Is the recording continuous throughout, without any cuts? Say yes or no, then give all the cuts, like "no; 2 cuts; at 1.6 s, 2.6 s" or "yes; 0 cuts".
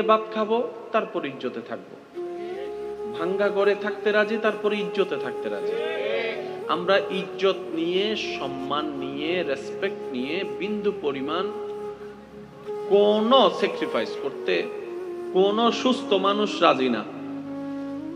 yes; 0 cuts